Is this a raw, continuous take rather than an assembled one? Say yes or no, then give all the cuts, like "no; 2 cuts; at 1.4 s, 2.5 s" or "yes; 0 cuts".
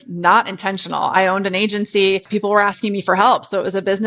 no; 1 cut; at 2.3 s